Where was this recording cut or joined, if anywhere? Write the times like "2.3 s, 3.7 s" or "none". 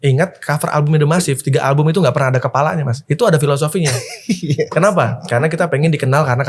3.0 s